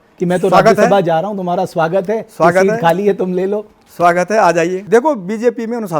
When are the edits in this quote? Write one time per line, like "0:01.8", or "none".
0:04.8